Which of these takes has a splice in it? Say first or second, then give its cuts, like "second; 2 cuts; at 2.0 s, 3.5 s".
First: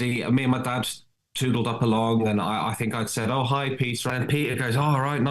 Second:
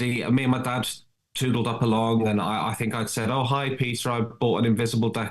first; 1 cut; at 4.0 s